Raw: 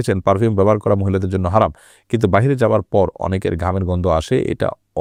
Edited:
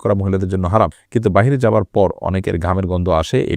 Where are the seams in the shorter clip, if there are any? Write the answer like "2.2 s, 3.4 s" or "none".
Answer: 1.0 s